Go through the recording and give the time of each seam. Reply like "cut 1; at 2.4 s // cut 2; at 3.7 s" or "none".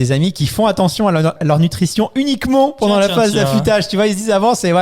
cut 1; at 1.3 s